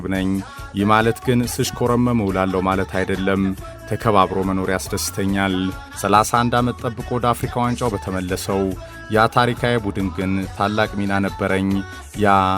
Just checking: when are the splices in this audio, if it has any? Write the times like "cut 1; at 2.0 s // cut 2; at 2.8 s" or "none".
cut 1; at 5.9 s